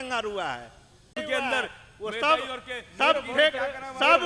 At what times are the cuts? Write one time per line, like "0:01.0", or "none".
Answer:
0:01.2